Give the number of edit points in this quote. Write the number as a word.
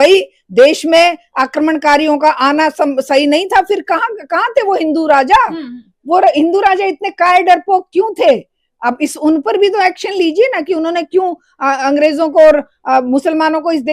zero